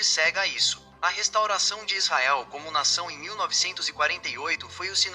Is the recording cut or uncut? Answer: cut